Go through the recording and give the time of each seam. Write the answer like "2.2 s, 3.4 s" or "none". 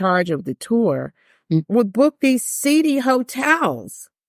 1.6 s